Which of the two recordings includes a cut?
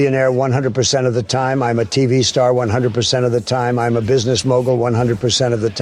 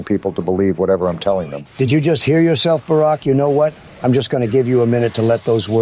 second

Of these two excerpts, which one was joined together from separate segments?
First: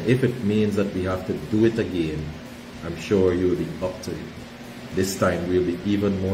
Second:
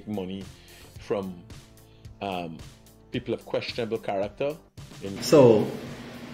second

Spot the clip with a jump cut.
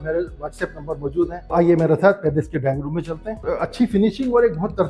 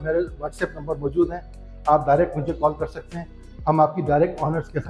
first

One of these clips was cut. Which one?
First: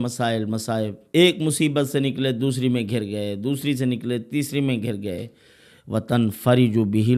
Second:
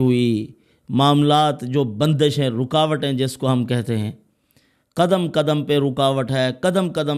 first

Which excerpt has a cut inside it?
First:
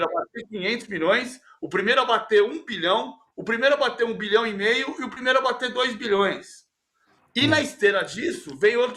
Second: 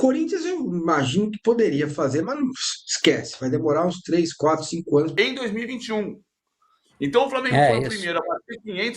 second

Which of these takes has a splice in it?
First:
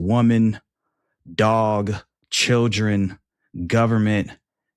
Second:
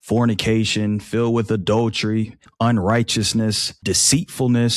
second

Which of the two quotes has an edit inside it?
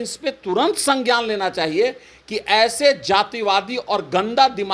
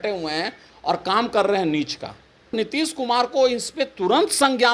second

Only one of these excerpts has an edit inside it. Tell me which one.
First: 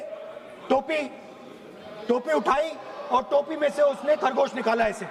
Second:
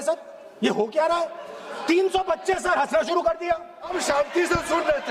second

